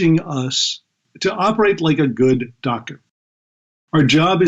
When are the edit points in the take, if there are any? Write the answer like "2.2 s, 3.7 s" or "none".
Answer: 1.0 s, 3.2 s